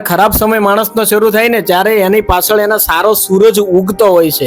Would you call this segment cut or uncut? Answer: uncut